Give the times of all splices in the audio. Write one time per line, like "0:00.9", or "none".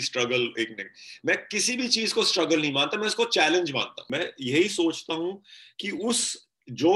0:04.1